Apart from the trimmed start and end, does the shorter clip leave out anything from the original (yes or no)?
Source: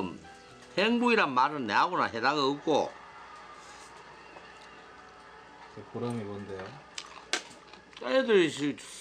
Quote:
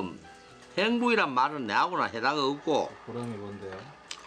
yes